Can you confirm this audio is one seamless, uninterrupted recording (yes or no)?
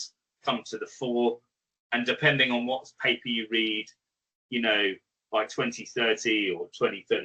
yes